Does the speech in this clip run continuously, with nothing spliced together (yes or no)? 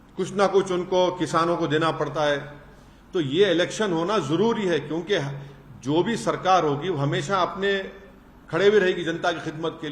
yes